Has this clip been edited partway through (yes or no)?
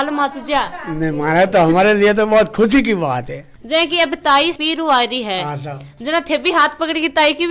yes